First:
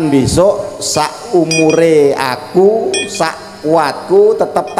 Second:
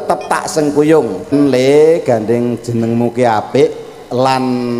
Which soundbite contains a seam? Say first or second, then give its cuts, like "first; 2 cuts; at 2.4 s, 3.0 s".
second; 1 cut; at 1.3 s